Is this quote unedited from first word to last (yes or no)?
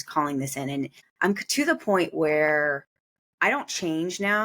no